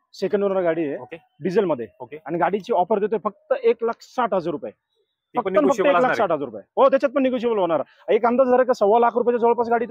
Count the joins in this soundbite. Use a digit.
0